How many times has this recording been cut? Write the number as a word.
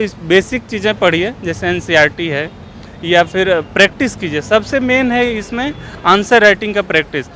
zero